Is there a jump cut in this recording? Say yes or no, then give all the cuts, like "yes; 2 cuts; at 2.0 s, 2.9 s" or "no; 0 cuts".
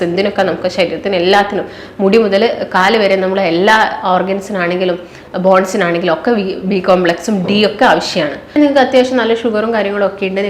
yes; 1 cut; at 8.4 s